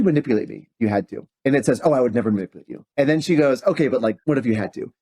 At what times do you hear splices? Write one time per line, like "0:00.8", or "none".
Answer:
0:01.2
0:02.9
0:04.2